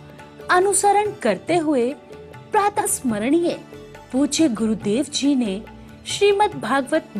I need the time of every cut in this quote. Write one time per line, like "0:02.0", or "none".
0:02.8